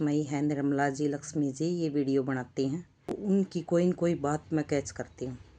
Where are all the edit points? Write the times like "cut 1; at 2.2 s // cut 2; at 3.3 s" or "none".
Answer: cut 1; at 3.2 s